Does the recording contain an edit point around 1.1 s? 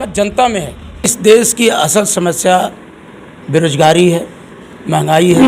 yes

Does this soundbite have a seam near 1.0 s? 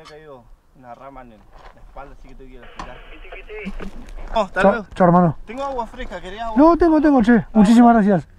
no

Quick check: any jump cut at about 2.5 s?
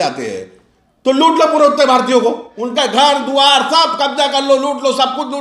yes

